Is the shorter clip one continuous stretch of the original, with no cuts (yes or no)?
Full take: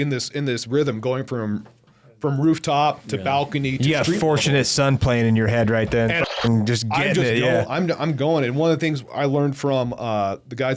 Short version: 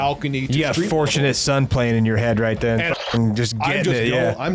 yes